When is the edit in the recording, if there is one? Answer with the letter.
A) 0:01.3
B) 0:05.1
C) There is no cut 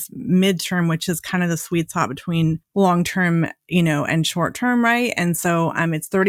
C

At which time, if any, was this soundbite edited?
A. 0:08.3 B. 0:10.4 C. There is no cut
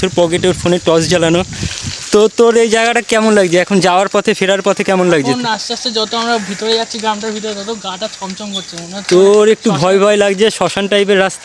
C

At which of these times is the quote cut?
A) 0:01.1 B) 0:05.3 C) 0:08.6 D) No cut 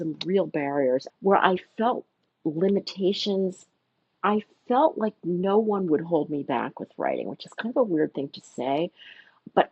A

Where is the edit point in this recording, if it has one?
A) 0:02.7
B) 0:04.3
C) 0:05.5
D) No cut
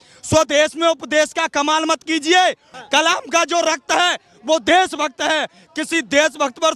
A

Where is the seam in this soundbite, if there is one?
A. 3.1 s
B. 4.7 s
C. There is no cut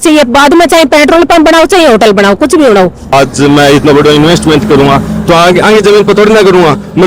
A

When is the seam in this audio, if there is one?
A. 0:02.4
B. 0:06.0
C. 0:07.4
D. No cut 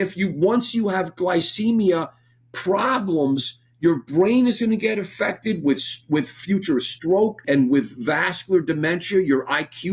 C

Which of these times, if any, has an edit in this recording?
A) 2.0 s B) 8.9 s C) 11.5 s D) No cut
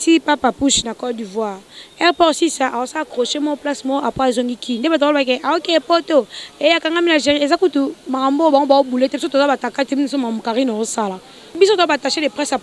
C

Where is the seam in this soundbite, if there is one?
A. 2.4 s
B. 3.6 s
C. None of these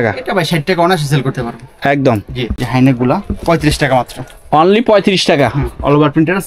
A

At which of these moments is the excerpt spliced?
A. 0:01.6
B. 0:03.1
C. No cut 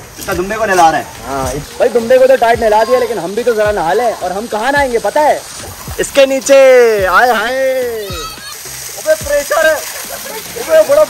A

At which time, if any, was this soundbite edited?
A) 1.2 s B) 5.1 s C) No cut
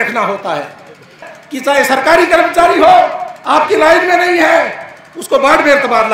A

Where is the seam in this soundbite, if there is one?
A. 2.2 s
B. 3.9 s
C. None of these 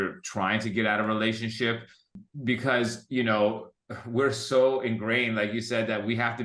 A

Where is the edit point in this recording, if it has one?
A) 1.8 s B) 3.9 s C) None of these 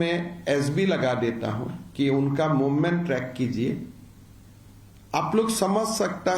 C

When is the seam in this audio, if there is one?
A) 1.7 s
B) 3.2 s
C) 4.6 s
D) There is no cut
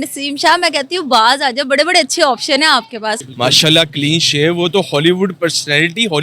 B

